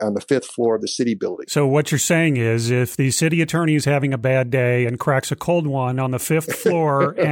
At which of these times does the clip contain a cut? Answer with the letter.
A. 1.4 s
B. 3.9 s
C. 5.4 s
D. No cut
A